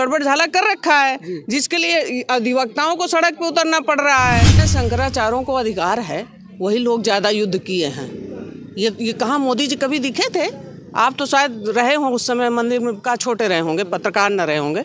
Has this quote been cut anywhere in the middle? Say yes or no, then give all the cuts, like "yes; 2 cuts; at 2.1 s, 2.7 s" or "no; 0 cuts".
yes; 1 cut; at 4.6 s